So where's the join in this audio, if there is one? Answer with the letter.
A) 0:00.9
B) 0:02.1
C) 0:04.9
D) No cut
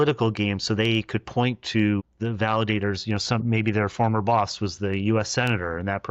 B